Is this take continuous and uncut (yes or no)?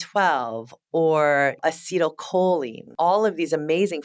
no